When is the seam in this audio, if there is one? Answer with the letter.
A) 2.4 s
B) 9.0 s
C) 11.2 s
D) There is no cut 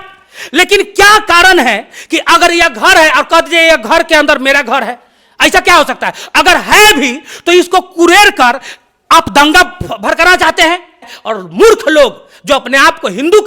C